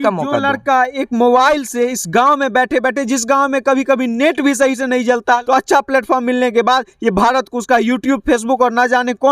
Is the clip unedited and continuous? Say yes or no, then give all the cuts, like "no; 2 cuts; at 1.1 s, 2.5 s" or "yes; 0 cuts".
no; 1 cut; at 5.4 s